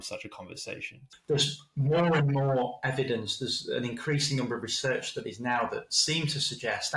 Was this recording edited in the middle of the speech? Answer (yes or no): yes